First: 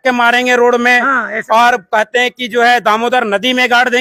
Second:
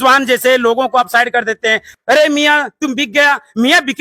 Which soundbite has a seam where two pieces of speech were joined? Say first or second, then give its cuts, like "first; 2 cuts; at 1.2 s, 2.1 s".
second; 1 cut; at 1.8 s